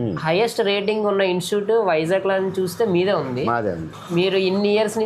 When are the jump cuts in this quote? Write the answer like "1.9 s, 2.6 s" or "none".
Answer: none